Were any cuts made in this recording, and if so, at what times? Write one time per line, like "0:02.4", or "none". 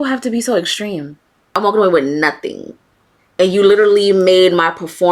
0:01.5